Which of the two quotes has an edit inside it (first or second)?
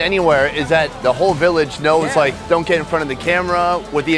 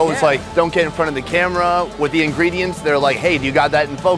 first